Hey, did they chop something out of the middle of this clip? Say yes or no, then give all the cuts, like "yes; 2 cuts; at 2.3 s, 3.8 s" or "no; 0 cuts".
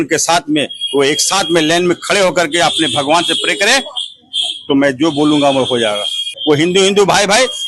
yes; 1 cut; at 6.3 s